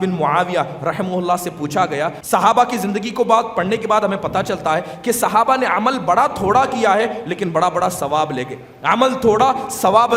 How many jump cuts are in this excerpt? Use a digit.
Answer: 1